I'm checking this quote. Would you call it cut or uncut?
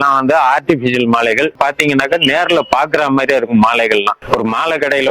cut